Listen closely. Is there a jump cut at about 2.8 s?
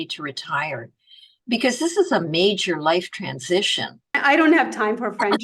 no; 1 cut; at 4.2 s

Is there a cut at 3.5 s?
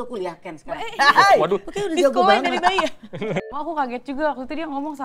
yes; 1 cut; at 3.5 s

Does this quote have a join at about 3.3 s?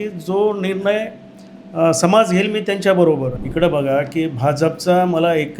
yes; 1 cut; at 3.3 s

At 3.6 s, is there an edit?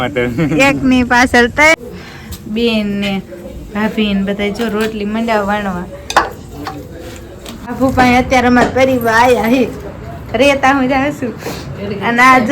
no; 2 cuts; at 1.7 s, 7.7 s

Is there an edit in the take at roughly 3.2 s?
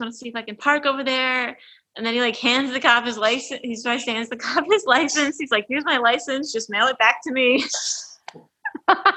no; 0 cuts

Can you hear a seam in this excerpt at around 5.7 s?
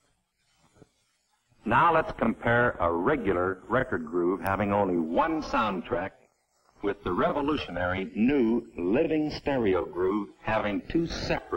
yes; 1 cut; at 5.7 s

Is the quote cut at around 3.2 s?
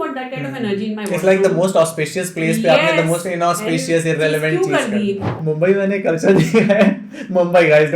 no; 1 cut; at 5.3 s

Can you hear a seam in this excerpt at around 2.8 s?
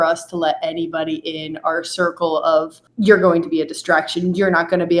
yes; 1 cut; at 2.8 s

